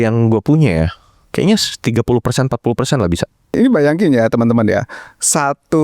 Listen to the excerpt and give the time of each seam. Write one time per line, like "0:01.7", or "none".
0:03.5